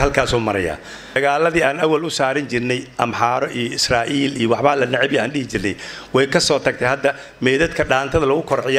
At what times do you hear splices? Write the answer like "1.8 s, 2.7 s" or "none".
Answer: 1.2 s